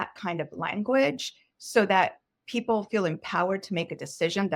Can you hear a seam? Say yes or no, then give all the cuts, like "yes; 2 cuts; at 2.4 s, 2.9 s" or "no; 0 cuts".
no; 0 cuts